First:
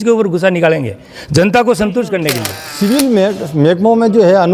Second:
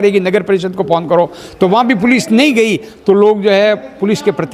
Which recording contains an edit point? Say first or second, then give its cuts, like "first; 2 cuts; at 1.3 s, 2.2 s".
first; 1 cut; at 2.6 s